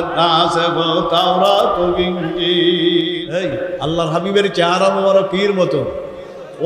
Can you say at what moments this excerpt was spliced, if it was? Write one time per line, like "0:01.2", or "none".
0:03.2